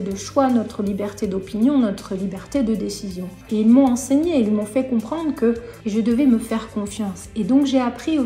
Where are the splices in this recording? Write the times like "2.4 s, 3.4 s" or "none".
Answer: 3.4 s, 5.7 s